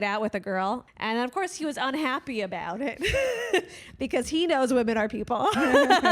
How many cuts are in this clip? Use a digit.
1